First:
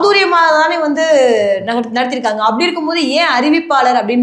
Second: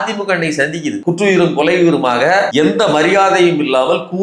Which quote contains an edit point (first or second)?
second